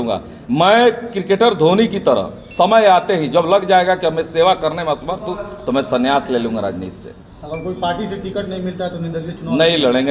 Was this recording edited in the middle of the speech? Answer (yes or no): no